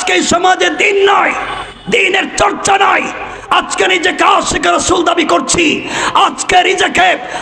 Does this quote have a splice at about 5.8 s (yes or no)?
no